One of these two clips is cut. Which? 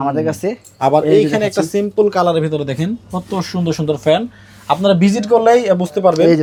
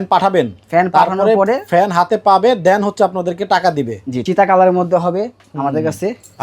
second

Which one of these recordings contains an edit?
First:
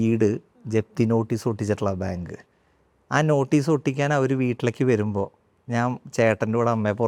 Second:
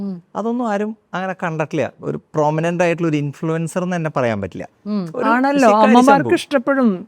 second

